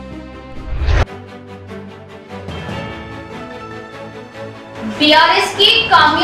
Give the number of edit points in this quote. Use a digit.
1